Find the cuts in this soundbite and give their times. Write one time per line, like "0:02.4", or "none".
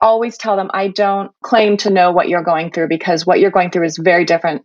0:01.4